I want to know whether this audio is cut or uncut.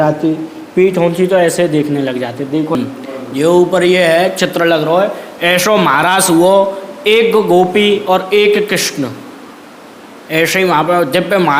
cut